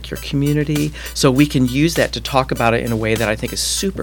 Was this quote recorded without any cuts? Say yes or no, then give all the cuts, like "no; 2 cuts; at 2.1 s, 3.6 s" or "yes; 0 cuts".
no; 1 cut; at 1.0 s